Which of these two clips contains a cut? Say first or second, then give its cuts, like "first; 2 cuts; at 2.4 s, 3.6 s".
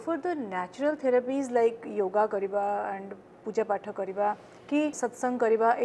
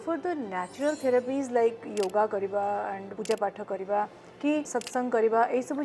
second; 1 cut; at 3.1 s